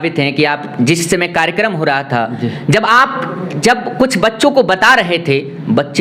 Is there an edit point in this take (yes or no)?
no